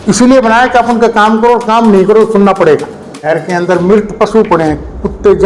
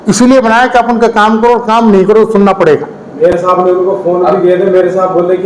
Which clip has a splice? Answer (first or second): first